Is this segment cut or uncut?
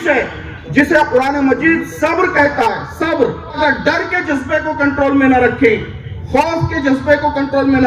cut